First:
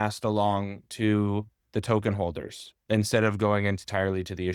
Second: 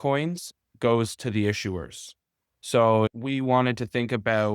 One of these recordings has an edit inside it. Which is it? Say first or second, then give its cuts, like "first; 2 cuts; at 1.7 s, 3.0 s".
second; 1 cut; at 3.1 s